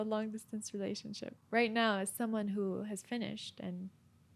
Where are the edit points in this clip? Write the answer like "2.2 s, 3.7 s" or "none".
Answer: none